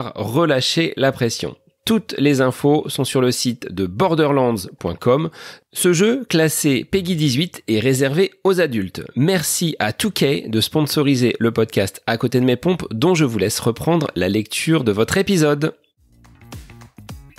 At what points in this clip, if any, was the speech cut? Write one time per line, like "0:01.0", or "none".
0:16.5